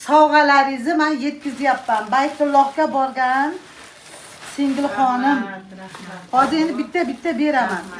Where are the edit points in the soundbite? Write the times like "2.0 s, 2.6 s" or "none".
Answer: none